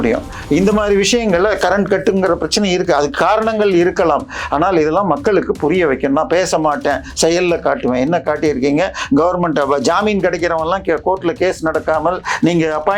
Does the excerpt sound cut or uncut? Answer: uncut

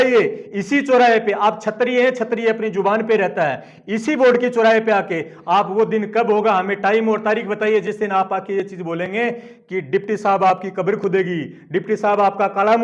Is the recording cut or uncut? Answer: uncut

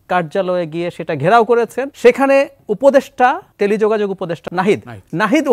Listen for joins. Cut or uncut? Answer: cut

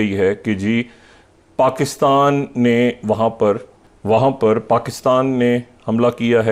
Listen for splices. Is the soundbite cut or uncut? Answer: uncut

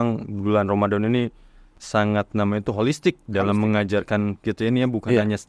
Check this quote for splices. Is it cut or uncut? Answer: uncut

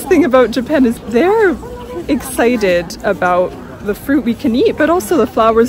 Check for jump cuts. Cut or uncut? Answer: cut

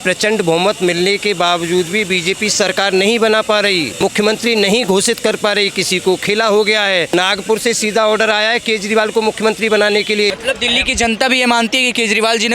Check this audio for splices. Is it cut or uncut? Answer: cut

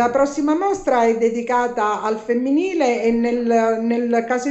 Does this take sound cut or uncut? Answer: cut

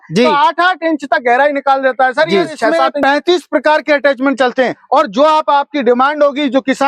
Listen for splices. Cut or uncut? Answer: cut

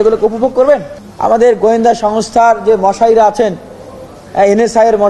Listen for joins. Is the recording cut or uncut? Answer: cut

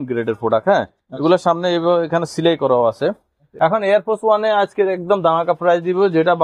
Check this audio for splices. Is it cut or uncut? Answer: cut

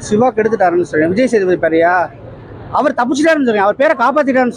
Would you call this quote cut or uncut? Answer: uncut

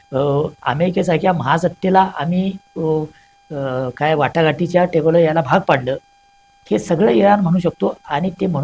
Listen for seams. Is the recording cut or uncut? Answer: uncut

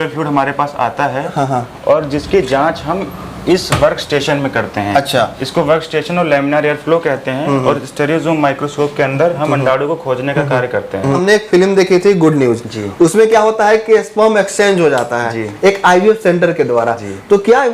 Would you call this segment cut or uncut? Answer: cut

